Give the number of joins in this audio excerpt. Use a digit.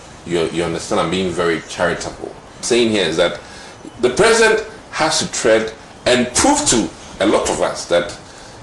1